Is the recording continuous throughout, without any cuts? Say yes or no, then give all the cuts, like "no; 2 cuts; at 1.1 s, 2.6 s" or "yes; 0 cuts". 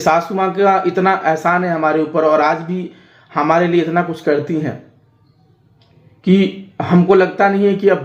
yes; 0 cuts